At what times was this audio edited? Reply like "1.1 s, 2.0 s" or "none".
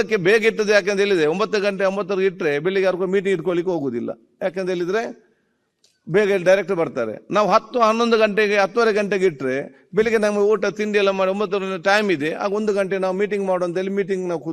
none